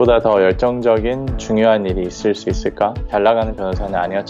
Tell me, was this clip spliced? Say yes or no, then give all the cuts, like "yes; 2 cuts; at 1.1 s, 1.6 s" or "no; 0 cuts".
yes; 1 cut; at 3.1 s